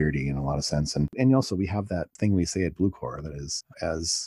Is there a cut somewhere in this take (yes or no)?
yes